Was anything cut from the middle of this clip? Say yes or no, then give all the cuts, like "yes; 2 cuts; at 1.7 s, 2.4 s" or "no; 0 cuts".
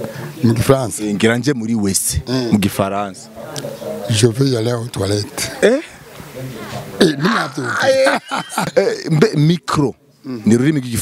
yes; 1 cut; at 8.7 s